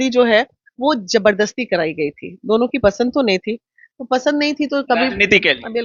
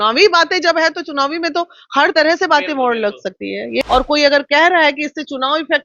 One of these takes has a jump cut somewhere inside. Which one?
second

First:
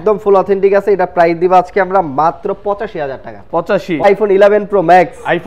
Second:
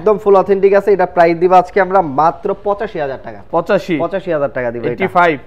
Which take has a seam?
first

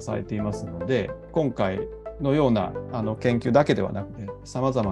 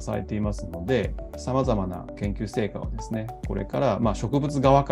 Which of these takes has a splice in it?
second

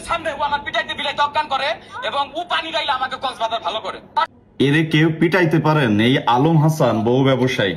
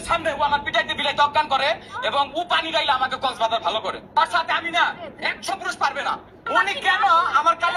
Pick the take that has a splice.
first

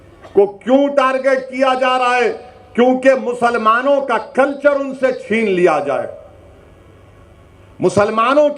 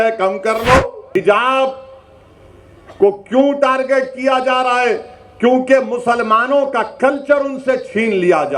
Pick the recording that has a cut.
second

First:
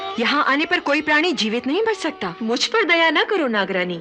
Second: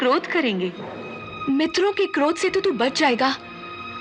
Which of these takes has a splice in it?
first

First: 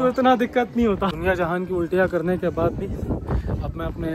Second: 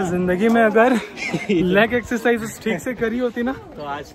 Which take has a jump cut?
first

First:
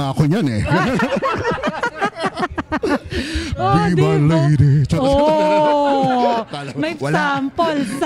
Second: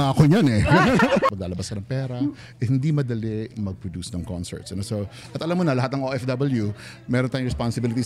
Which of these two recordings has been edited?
second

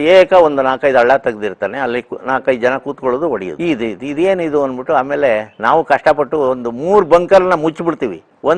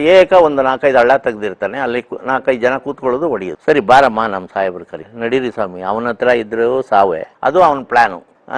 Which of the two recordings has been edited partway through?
second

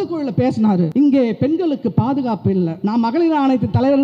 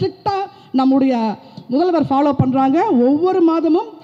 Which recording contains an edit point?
first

